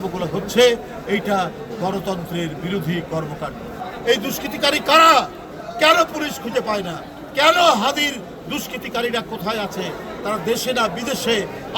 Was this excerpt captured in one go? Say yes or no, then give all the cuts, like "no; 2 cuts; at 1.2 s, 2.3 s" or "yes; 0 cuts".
no; 1 cut; at 3.8 s